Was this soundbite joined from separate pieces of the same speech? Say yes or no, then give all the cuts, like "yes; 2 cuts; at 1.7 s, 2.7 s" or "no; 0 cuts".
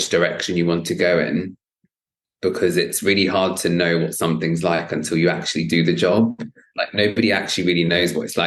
no; 0 cuts